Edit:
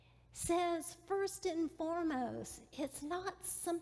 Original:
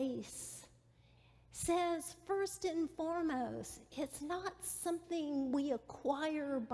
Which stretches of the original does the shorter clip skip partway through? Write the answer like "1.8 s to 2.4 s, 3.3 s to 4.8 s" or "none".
none